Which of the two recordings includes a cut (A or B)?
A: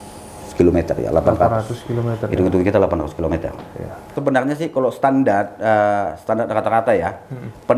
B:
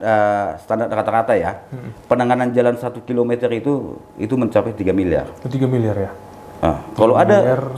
A